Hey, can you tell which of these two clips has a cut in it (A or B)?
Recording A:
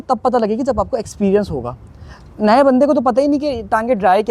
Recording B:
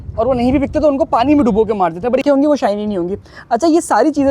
B